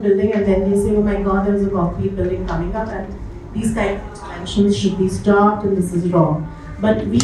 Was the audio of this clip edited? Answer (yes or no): no